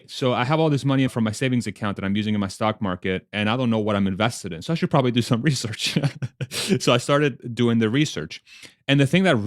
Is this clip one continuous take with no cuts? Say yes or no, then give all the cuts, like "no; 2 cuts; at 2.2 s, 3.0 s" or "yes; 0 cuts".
no; 1 cut; at 1.1 s